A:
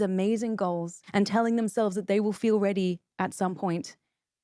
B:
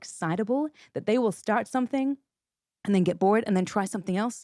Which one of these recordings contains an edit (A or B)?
A